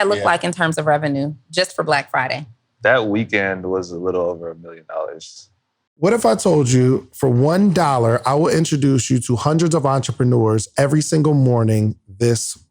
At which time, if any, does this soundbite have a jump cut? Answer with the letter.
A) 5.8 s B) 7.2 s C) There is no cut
A